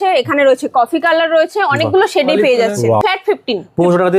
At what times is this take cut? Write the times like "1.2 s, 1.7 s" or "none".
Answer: 3.0 s